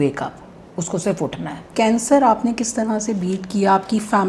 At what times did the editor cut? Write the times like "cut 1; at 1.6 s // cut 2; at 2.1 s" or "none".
cut 1; at 1.6 s